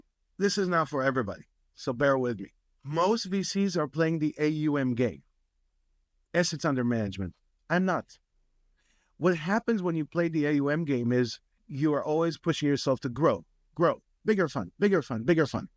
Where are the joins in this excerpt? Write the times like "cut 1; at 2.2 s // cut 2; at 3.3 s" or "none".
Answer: none